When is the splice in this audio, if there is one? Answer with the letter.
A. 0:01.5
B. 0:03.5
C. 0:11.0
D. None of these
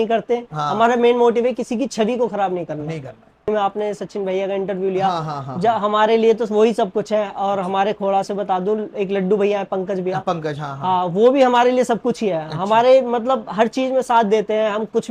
B